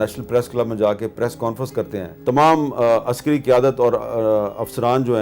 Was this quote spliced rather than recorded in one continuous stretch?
yes; 1 cut; at 2.0 s

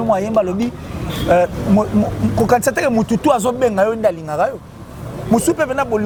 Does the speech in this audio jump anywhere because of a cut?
no; 0 cuts

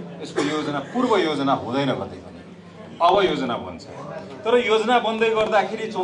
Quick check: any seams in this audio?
no; 0 cuts

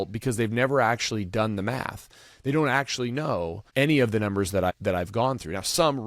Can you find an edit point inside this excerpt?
yes; 2 cuts; at 3.6 s, 4.7 s

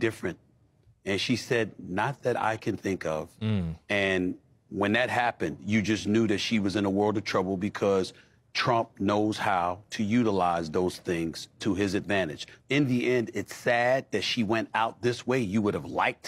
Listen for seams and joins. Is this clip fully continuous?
yes; 0 cuts

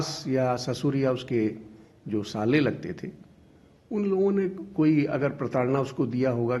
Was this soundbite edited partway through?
no; 0 cuts

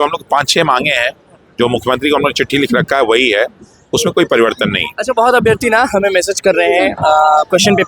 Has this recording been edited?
no; 0 cuts

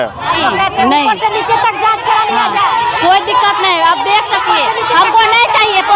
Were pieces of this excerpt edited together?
no; 0 cuts

